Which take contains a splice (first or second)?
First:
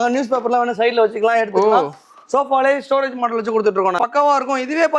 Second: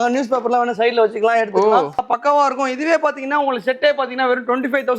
second